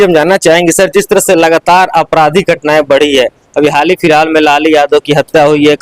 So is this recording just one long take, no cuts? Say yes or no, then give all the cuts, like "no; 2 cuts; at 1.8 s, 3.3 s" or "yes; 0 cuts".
yes; 0 cuts